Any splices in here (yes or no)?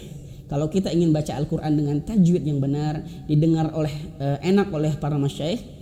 no